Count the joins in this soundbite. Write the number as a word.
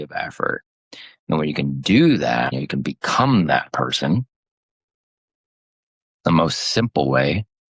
one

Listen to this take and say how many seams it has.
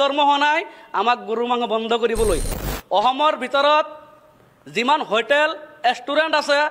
one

